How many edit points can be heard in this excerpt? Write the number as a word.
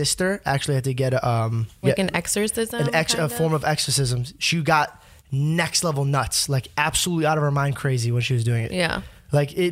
one